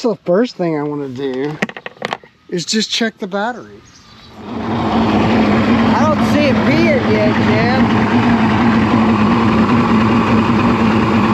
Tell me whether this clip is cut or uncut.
cut